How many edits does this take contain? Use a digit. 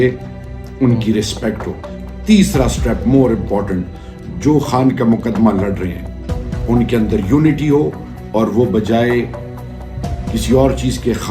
0